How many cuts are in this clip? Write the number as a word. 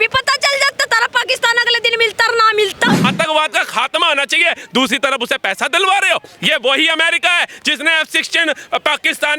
one